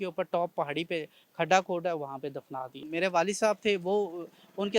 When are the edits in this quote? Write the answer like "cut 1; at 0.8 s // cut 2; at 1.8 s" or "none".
cut 1; at 2.8 s